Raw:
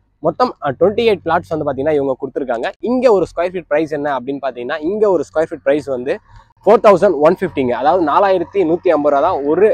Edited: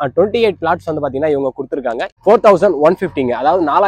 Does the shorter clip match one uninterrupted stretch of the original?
no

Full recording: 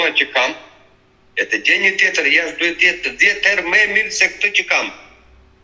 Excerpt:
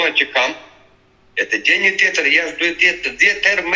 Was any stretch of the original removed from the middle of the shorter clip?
no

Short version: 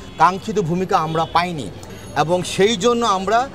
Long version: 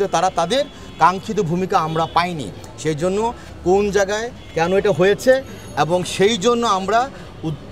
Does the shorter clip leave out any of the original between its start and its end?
yes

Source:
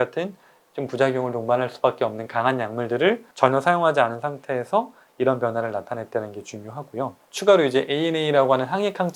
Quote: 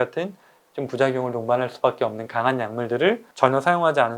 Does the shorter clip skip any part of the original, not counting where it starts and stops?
no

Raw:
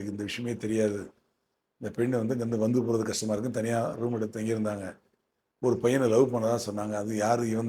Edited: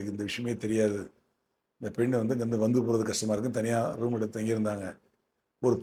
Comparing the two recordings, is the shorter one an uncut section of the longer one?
yes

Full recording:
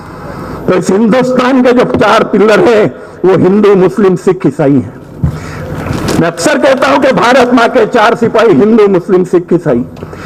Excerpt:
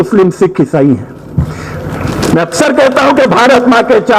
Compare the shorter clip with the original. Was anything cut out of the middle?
no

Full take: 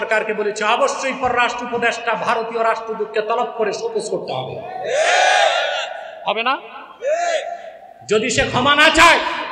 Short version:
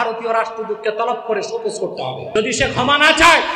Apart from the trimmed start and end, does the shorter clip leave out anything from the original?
yes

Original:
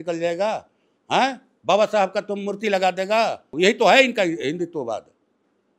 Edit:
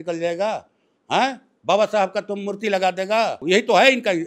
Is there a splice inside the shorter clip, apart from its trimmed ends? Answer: yes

